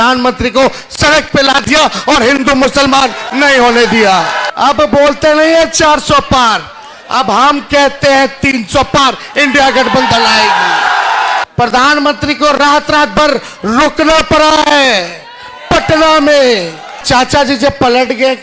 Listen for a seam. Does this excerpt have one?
yes; 3 cuts; at 4.4 s, 11.4 s, 17.0 s

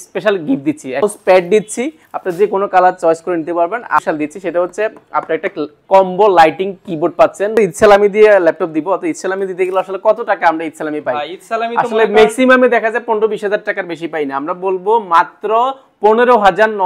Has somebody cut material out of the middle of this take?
yes; 3 cuts; at 1.0 s, 4.0 s, 7.6 s

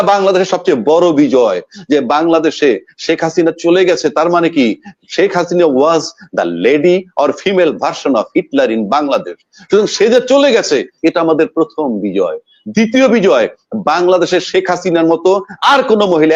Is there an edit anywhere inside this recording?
no; 0 cuts

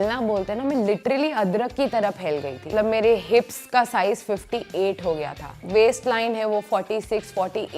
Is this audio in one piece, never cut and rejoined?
no; 2 cuts; at 2.7 s, 5.6 s

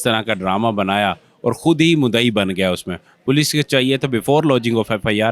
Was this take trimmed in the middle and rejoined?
no; 0 cuts

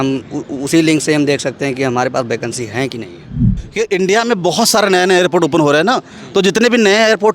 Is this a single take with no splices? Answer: no; 1 cut; at 3.6 s

